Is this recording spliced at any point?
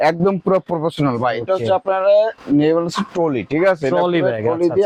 no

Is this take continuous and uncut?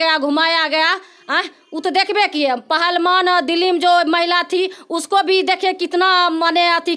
yes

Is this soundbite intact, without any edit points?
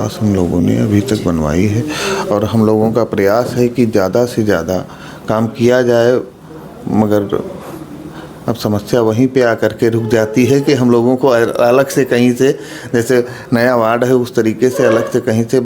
yes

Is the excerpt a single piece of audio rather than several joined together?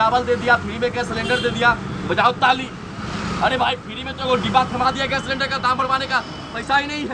yes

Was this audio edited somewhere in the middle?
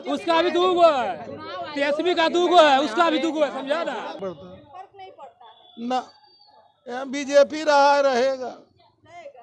yes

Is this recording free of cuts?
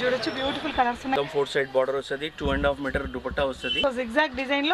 no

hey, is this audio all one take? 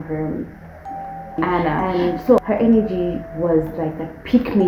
no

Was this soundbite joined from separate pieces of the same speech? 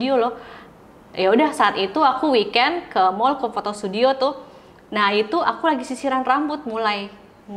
no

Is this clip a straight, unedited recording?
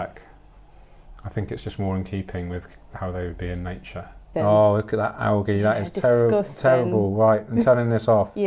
no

